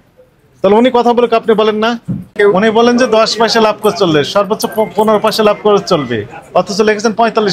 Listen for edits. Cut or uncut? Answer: cut